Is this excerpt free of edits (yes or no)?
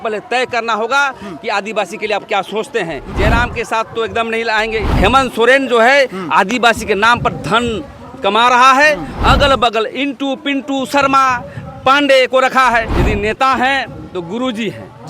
no